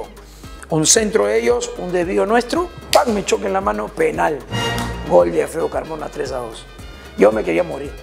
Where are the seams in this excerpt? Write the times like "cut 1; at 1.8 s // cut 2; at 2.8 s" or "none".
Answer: none